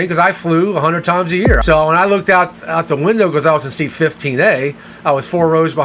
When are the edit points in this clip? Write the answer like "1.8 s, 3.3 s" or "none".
1.6 s